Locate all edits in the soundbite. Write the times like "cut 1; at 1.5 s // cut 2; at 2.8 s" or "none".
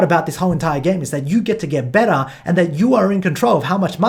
none